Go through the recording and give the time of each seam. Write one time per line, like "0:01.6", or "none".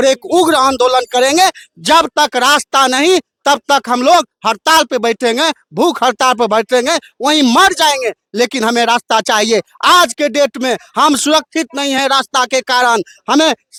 none